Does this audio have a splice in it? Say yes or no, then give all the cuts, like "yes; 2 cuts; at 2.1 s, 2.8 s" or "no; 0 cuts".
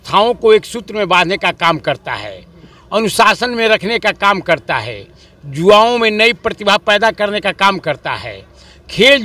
no; 0 cuts